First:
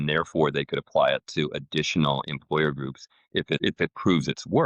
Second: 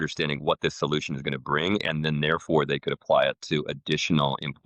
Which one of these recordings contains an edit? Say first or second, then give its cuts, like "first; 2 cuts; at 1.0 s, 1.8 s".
first; 1 cut; at 3.6 s